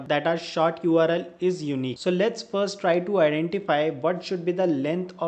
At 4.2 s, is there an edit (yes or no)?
no